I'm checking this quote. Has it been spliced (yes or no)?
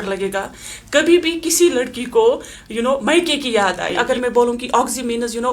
yes